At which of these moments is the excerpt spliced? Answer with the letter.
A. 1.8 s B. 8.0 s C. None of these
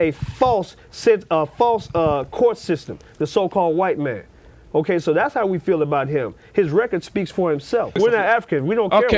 B